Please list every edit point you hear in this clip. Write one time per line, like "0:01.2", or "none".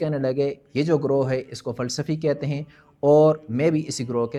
none